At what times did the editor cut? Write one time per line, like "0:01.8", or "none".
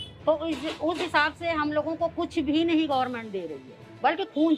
none